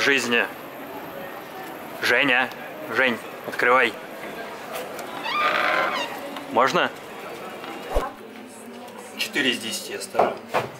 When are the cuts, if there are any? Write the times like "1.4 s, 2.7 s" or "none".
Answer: 8.0 s